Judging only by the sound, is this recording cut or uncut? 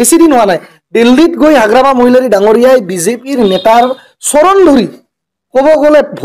uncut